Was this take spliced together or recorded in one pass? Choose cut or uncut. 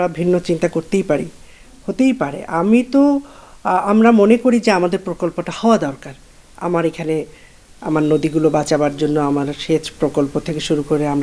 uncut